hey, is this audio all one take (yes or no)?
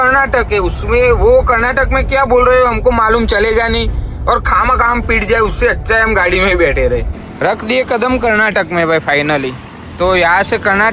no